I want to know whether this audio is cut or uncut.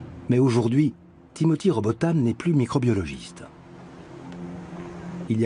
cut